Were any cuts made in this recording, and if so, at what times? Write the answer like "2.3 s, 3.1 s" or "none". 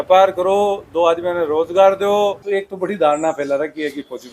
2.4 s